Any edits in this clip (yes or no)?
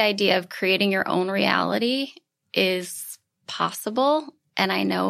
no